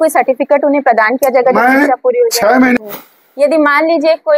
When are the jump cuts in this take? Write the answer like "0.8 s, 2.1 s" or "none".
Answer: 2.8 s